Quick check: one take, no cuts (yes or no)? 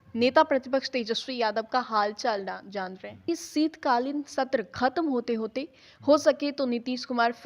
no